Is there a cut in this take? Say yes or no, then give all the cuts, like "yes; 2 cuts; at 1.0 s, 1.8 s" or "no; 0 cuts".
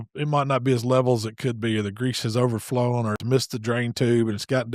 yes; 1 cut; at 3.2 s